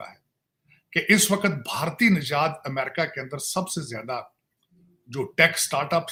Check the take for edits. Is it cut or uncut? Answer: uncut